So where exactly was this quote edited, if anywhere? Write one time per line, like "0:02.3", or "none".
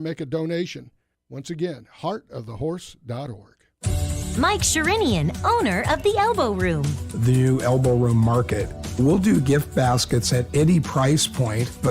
0:03.7